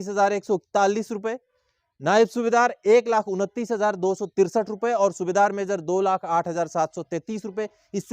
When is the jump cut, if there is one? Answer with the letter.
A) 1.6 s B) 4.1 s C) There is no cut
A